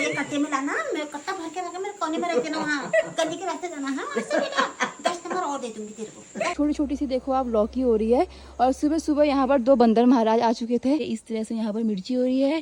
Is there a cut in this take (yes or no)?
yes